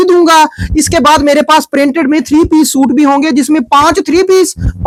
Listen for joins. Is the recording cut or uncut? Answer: uncut